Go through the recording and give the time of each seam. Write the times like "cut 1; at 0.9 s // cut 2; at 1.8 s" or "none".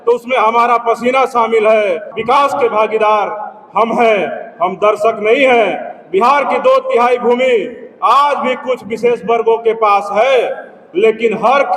cut 1; at 2.1 s